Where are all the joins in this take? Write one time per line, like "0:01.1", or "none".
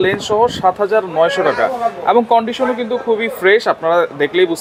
none

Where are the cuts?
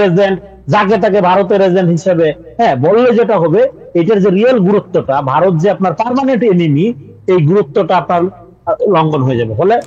none

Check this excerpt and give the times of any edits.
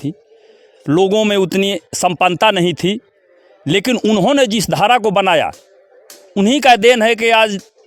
none

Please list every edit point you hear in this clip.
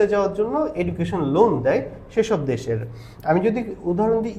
none

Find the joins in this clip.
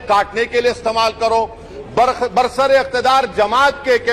none

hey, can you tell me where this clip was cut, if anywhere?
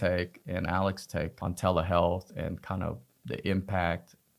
0:01.3

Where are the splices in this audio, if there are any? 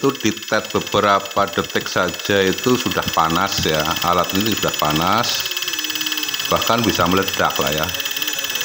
none

